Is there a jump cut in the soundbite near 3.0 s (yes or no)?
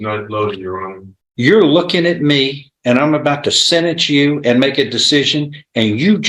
no